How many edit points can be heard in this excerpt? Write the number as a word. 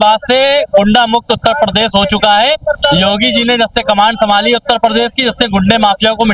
zero